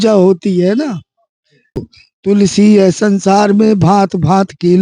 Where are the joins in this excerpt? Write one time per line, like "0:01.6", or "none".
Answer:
0:01.8

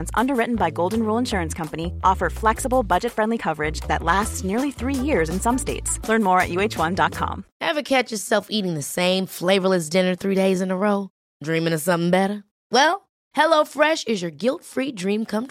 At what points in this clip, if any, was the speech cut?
0:07.5

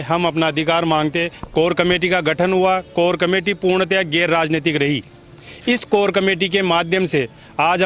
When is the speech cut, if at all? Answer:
0:01.4

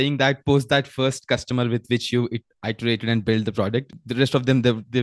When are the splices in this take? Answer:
0:03.9

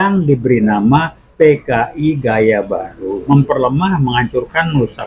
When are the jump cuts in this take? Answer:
0:03.2

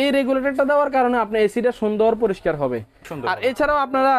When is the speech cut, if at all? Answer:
0:03.1

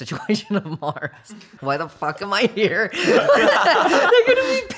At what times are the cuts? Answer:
0:01.2
0:04.1

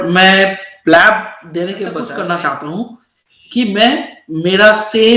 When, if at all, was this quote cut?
0:02.1

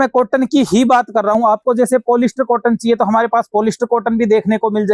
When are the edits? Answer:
none

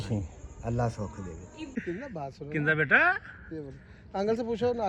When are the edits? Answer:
0:01.6

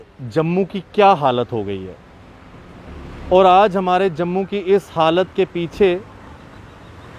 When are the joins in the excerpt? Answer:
none

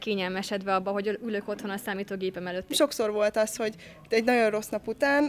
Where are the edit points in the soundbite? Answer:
0:02.7

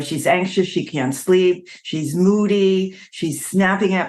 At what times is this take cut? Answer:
none

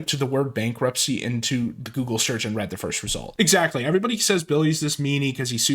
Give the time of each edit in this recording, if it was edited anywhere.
0:03.5

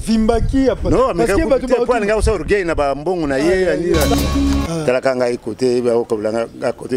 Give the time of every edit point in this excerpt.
0:04.1

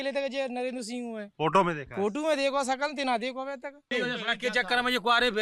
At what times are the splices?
0:03.9

